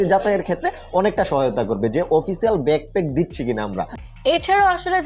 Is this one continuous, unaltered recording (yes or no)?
yes